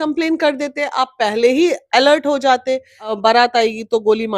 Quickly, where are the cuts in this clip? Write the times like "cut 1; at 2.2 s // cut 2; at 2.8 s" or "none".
cut 1; at 3.1 s

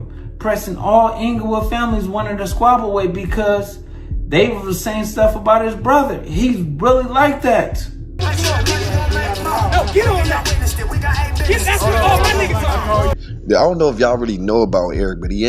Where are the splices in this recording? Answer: cut 1; at 8.2 s // cut 2; at 13.1 s

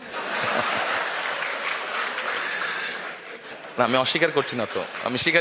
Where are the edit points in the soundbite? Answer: cut 1; at 3.5 s

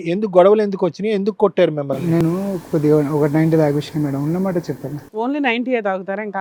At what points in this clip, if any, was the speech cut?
none

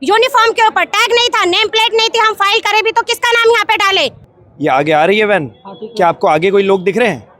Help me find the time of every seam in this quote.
cut 1; at 4.2 s

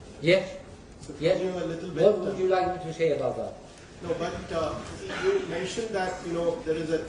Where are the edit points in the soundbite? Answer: cut 1; at 5.7 s

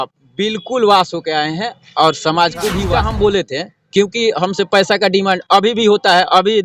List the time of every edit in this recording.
cut 1; at 2.8 s

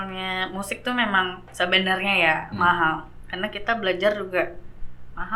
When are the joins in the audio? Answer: none

